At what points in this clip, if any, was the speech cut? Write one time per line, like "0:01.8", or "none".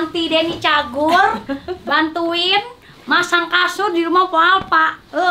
none